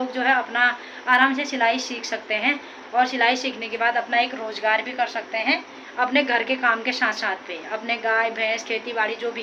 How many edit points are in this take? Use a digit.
0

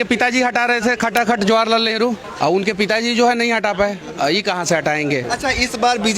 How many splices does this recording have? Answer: 2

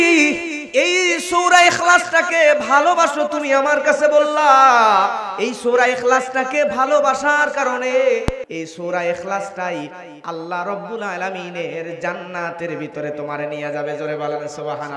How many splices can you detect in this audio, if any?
1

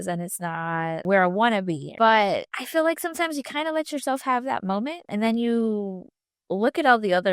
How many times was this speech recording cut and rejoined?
3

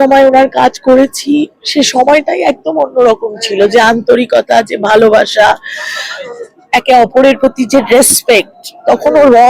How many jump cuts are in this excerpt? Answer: 0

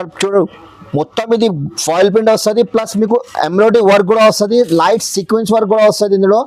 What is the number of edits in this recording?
0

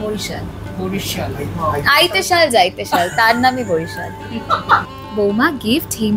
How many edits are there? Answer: 1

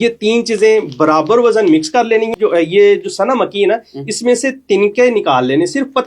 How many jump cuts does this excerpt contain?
1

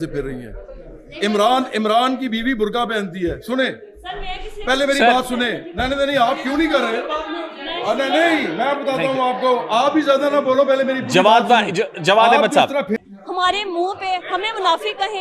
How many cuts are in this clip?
1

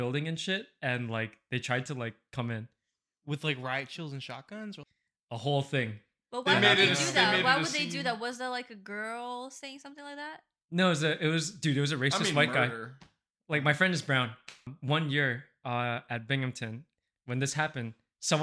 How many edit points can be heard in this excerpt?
2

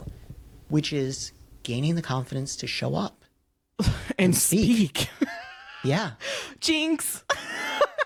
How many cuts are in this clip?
0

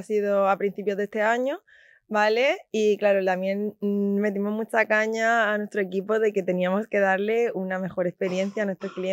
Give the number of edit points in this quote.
0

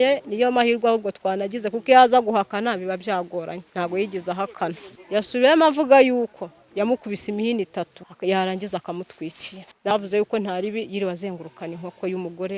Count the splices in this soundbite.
1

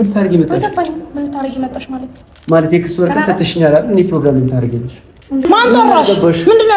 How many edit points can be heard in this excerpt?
1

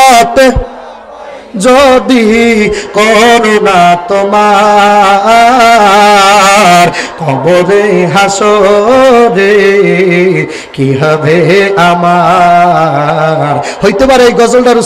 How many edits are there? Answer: 0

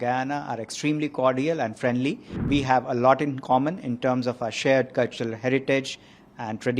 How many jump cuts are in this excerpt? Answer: 1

